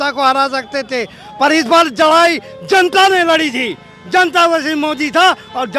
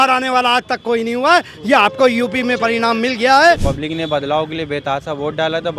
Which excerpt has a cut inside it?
second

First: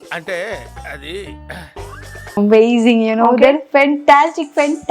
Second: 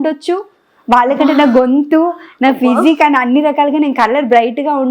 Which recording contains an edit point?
first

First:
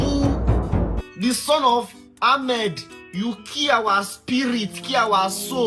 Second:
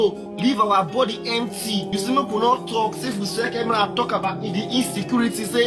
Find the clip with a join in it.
first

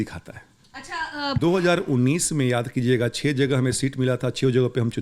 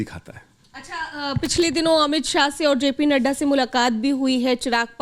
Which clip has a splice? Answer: first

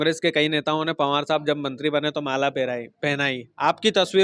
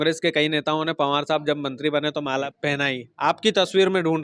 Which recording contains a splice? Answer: second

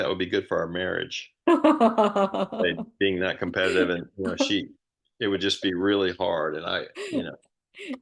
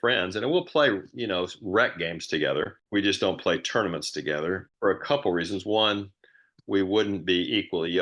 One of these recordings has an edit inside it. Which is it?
second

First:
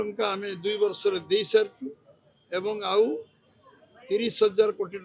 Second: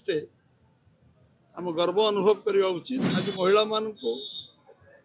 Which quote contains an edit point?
second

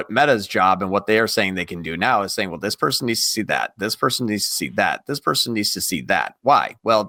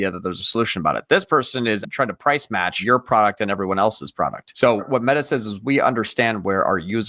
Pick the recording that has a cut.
second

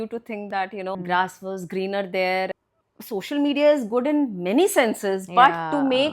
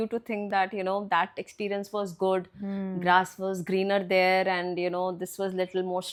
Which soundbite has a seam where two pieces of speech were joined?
first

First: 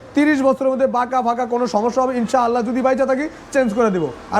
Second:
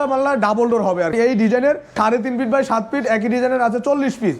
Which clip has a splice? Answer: second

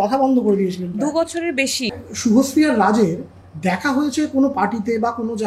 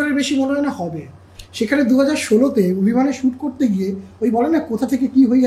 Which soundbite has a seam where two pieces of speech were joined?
first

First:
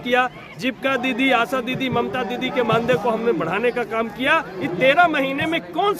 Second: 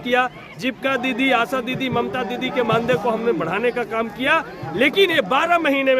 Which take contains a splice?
first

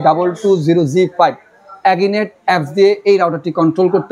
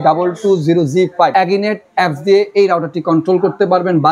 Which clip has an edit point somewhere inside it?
second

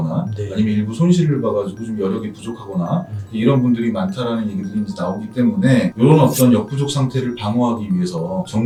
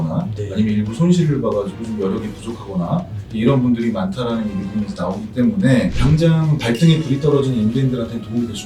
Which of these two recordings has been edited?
second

